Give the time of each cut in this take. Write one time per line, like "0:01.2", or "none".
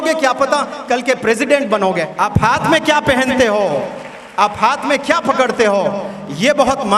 0:02.1